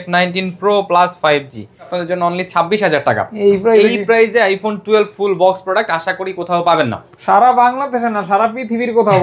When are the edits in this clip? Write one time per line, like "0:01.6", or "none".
0:01.9